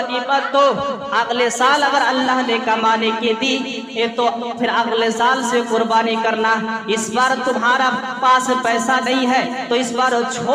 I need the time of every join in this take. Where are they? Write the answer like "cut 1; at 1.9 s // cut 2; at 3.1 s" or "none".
none